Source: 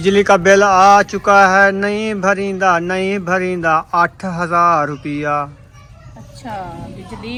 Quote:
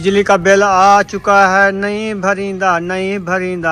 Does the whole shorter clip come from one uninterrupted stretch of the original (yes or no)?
yes